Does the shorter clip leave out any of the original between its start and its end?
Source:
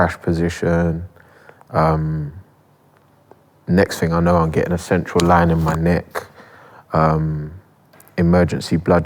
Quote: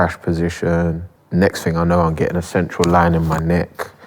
yes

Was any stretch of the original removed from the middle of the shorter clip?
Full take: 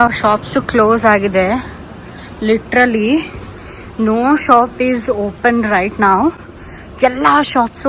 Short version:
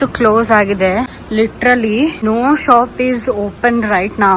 yes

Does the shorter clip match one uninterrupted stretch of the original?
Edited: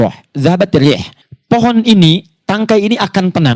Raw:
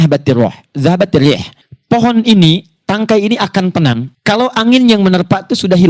yes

